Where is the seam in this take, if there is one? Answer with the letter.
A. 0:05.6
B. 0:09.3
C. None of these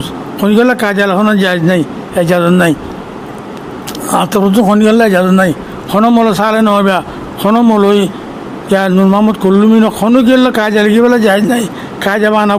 C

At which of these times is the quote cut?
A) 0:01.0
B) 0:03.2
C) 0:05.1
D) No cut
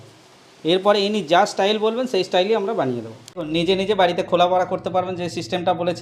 B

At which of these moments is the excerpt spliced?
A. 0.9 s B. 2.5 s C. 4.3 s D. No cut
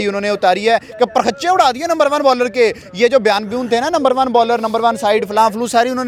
D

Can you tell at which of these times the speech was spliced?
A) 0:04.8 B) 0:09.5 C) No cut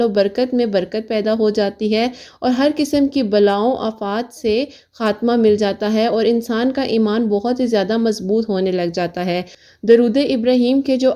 B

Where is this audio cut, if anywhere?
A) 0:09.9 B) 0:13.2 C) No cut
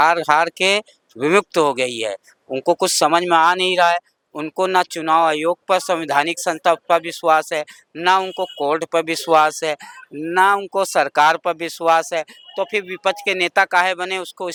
C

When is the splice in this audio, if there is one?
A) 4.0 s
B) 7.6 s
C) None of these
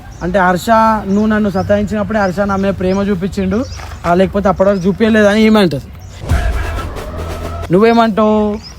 B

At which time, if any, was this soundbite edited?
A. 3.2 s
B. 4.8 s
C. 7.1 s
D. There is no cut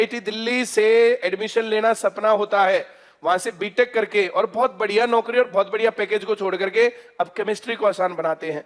D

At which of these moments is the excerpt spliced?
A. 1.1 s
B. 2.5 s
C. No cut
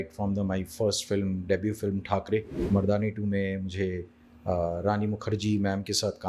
B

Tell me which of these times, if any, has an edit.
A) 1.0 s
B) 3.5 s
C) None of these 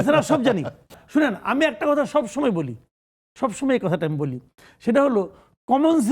A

